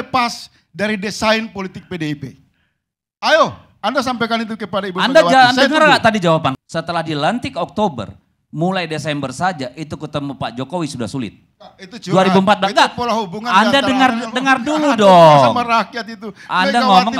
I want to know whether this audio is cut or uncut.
cut